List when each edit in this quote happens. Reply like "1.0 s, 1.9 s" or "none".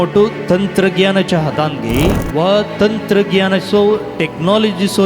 2.2 s